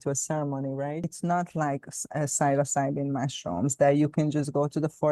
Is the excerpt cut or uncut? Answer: cut